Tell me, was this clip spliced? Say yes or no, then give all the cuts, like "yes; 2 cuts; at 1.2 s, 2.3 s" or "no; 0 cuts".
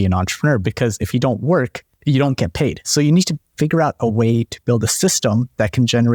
no; 0 cuts